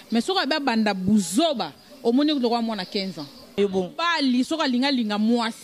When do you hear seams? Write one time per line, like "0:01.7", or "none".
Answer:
0:03.5